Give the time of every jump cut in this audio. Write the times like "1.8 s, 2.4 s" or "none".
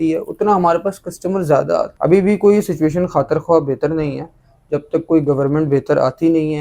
1.9 s